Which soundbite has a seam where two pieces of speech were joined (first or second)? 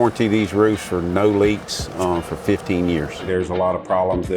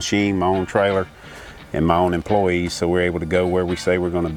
first